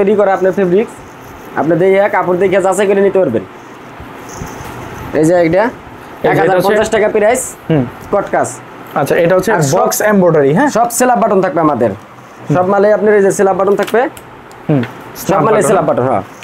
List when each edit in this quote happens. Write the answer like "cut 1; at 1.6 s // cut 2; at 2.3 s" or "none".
none